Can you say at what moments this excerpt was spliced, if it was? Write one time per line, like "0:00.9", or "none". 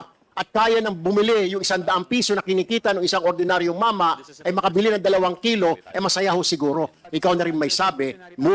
0:07.0